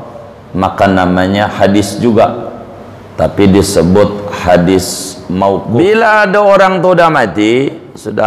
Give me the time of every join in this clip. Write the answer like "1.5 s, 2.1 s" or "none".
5.7 s